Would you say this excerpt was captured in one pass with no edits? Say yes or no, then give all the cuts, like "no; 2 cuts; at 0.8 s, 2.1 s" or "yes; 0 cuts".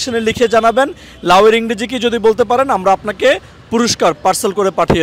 yes; 0 cuts